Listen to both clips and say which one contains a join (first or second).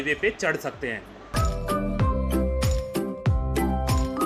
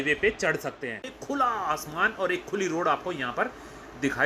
second